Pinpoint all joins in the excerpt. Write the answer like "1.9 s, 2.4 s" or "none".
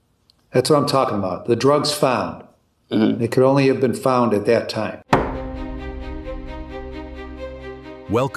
5.0 s